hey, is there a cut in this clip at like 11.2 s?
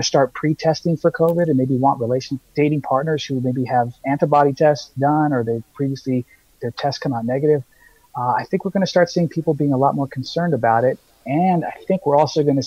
no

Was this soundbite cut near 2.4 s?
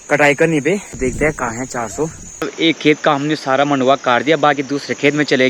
yes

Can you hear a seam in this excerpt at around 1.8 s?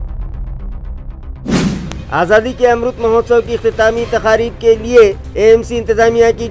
yes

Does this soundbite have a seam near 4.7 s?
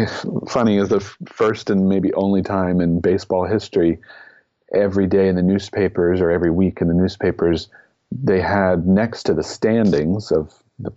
no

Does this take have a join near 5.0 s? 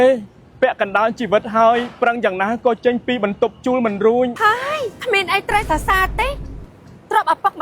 no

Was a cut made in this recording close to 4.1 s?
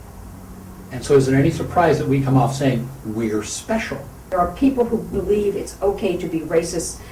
yes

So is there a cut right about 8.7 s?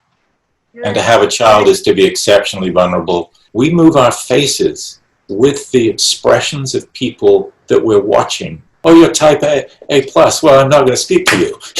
yes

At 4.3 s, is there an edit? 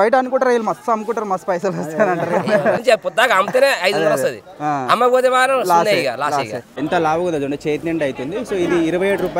no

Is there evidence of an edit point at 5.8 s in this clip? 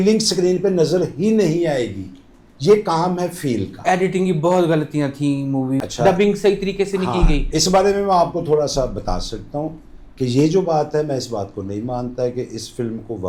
yes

